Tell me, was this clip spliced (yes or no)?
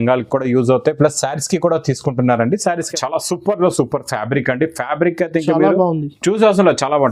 yes